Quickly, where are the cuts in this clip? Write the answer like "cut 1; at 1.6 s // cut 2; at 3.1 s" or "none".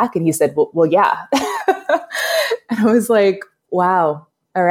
none

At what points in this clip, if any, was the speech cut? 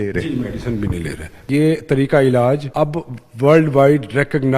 cut 1; at 1.5 s // cut 2; at 2.7 s

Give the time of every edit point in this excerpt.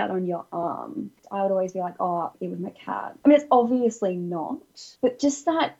cut 1; at 1.2 s // cut 2; at 3.1 s // cut 3; at 4.8 s

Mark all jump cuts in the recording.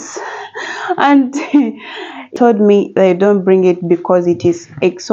cut 1; at 2.3 s

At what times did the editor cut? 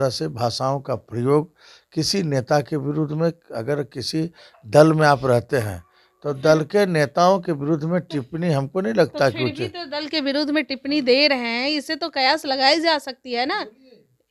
none

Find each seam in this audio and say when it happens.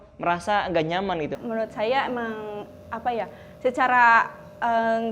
cut 1; at 1.4 s

